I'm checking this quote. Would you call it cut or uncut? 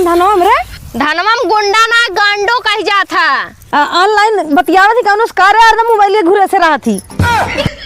cut